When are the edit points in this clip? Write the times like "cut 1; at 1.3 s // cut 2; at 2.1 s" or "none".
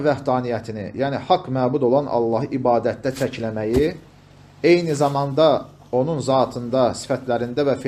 none